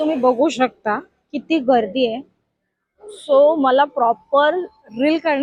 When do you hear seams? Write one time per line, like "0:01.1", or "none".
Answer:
none